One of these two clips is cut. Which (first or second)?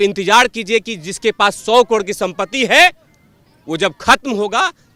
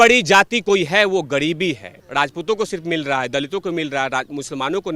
second